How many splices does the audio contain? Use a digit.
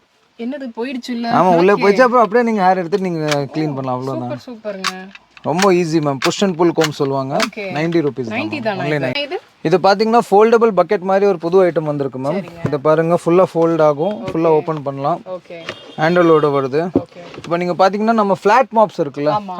1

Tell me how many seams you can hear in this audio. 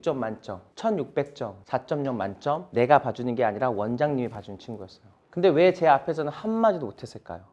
1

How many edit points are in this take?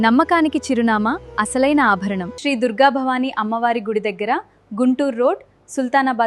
1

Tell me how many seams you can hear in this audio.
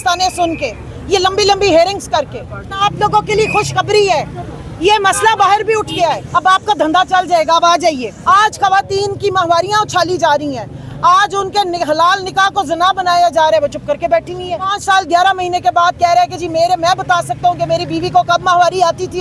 4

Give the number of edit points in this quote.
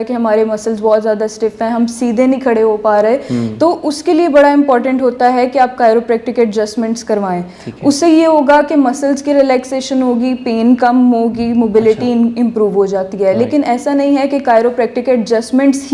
0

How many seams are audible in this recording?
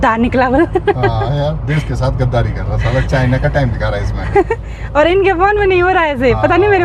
0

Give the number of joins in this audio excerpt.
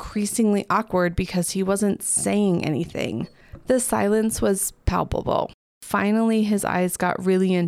1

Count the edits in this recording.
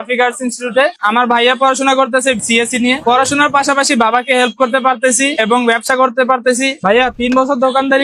2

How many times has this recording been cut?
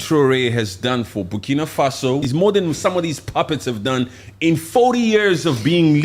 1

